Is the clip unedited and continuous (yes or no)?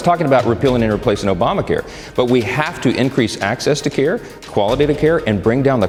yes